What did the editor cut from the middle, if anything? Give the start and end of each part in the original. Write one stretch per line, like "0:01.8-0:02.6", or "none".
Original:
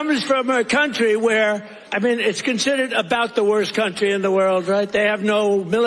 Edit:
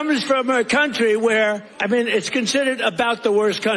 0:01.7-0:01.8